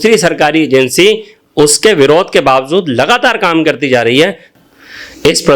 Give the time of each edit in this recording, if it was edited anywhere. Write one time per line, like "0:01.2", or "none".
0:04.5